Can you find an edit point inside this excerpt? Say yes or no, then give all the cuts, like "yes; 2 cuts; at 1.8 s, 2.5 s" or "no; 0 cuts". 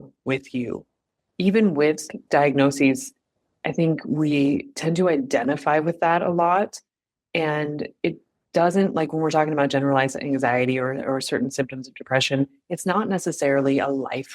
yes; 1 cut; at 2.2 s